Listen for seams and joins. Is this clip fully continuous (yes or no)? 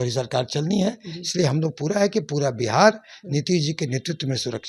yes